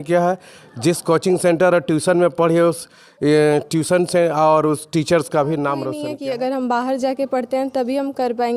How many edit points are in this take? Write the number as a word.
one